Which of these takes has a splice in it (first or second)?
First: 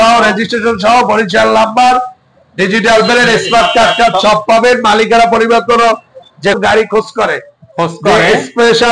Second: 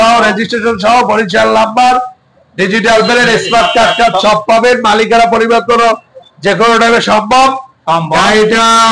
first